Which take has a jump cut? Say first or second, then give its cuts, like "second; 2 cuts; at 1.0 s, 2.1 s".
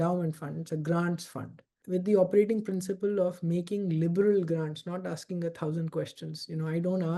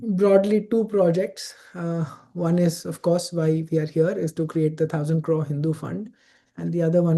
first; 1 cut; at 1.8 s